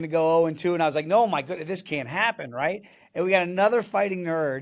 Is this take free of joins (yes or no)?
yes